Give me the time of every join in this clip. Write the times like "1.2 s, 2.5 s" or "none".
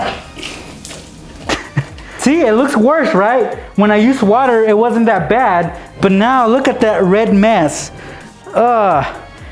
2.1 s